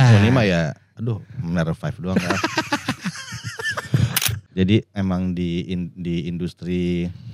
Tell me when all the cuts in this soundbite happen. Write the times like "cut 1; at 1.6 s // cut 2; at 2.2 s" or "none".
cut 1; at 4.4 s